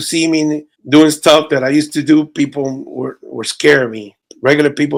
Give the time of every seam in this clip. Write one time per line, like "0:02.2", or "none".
none